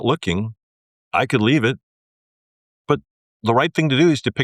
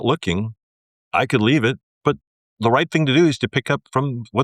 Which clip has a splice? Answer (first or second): second